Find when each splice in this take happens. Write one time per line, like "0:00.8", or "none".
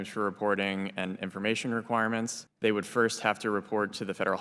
0:02.4